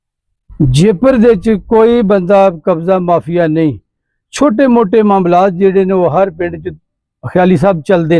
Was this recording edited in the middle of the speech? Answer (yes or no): no